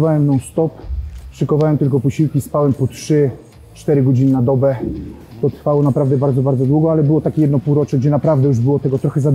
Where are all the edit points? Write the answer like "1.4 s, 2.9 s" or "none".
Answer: none